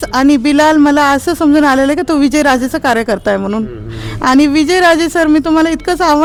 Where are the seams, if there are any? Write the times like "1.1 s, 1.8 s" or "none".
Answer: none

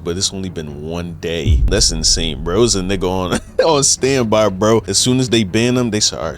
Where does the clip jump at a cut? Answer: 1.6 s, 4.9 s

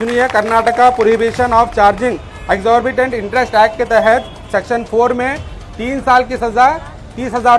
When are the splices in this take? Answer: none

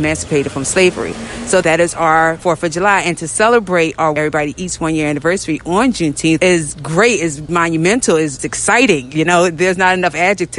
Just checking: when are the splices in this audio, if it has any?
1.6 s, 2.4 s, 4.2 s, 6.4 s, 7.4 s, 8.4 s

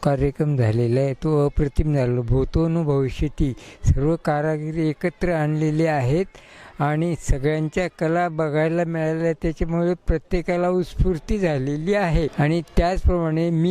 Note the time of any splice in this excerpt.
12.3 s

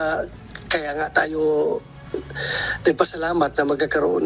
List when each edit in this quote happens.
none

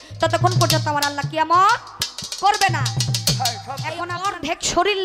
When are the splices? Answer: 4.2 s

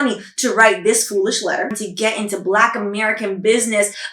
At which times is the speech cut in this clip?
1.8 s

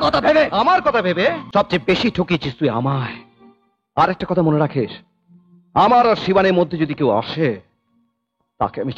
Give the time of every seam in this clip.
1.4 s

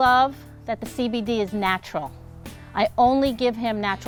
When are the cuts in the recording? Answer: none

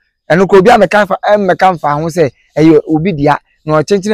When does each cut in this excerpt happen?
none

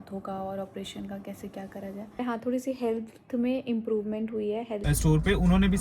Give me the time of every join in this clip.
2.2 s, 4.8 s

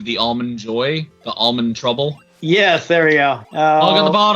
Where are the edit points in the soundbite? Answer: 2.3 s, 3.4 s

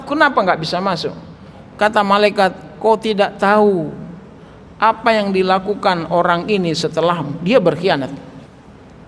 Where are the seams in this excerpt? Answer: none

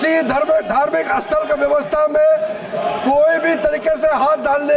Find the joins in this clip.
none

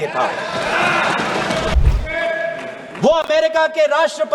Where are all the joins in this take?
1.8 s

